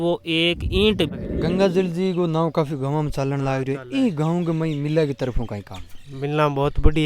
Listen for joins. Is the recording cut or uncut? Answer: cut